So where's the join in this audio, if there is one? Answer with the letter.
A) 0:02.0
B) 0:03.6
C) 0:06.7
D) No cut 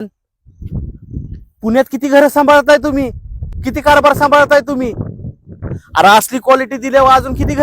B